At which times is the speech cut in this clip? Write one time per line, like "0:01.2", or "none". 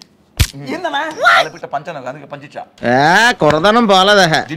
0:02.7